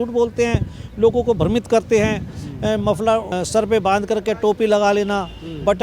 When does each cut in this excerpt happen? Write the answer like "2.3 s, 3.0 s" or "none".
3.3 s